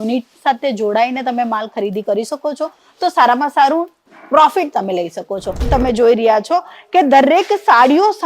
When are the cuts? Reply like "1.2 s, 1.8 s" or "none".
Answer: 5.6 s